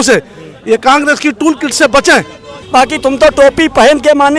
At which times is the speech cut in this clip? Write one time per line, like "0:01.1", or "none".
0:02.6